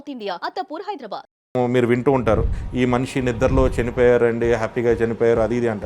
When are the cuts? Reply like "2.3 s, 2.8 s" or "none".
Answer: 1.5 s